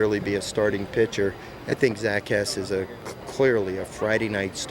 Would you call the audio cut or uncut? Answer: cut